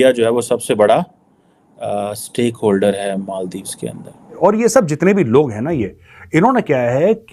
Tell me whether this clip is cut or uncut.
cut